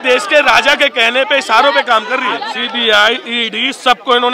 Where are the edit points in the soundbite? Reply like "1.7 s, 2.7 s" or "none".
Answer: 2.5 s